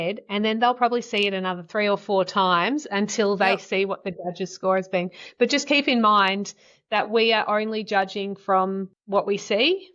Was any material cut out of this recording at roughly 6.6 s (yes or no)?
no